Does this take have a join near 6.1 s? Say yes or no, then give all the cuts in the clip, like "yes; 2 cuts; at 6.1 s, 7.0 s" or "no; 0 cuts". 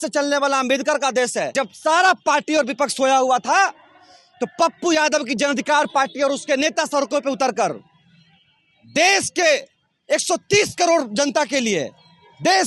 no; 1 cut; at 1.5 s